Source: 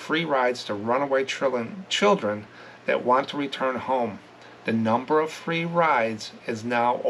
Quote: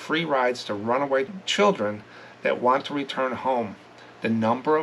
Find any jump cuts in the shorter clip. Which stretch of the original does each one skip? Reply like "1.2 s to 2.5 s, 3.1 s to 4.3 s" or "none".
1.3 s to 1.8 s